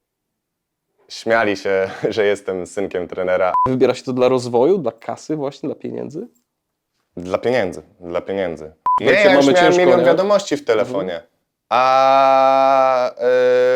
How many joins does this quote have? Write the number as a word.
two